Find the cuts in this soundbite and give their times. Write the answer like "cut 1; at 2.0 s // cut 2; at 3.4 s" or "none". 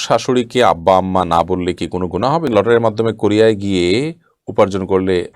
cut 1; at 2.5 s